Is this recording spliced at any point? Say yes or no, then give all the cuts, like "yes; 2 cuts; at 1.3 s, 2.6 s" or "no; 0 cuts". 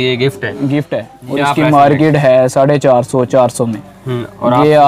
yes; 1 cut; at 1.2 s